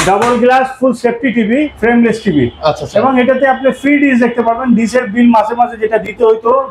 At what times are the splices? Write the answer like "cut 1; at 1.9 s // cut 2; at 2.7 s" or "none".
cut 1; at 1.7 s